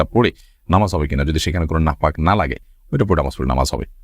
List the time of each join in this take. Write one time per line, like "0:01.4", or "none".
none

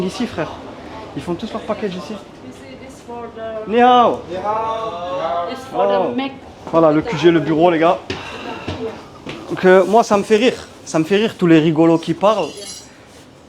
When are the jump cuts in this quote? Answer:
0:06.4

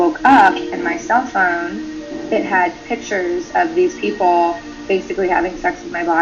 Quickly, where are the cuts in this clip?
none

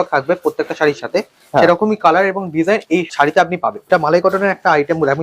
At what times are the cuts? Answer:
0:03.1
0:03.9

